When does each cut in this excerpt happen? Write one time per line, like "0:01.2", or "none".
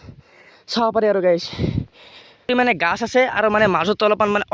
0:02.5